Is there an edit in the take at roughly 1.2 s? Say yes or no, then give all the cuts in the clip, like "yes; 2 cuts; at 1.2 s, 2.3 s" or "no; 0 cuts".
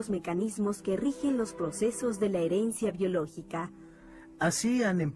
yes; 1 cut; at 1.2 s